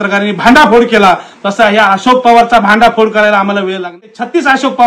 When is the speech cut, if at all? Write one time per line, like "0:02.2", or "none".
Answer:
0:03.9